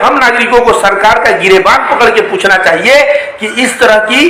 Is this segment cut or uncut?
uncut